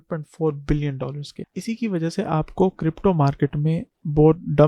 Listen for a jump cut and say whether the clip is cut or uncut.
cut